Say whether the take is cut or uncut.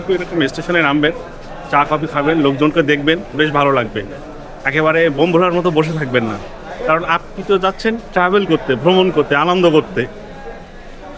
uncut